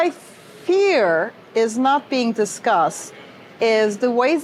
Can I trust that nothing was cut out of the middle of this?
yes; 0 cuts

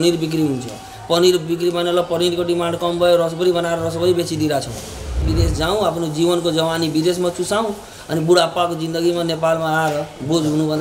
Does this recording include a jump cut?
yes; 1 cut; at 5.3 s

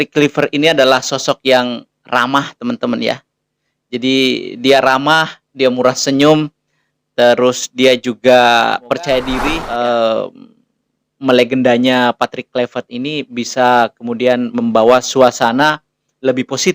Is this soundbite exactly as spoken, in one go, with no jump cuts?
no; 1 cut; at 9.5 s

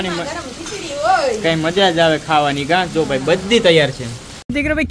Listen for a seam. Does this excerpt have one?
no; 0 cuts

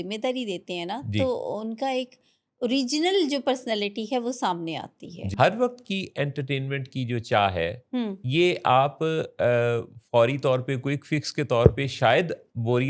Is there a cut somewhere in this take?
yes; 1 cut; at 5.3 s

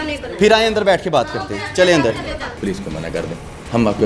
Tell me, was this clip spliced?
yes; 1 cut; at 2.5 s

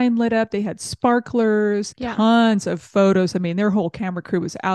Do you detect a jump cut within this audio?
yes; 1 cut; at 2.0 s

